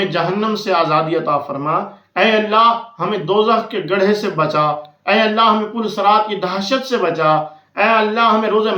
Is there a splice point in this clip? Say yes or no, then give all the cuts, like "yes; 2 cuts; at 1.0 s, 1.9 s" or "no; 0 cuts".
no; 0 cuts